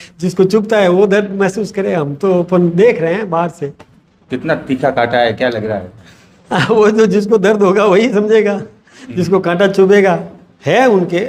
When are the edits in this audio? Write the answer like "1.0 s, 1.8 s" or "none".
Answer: none